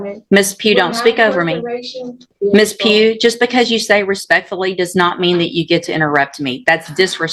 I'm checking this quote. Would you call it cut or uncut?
cut